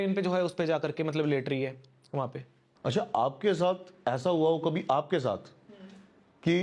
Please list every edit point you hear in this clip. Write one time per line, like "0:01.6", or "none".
0:02.7